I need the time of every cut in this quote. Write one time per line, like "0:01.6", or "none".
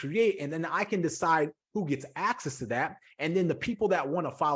none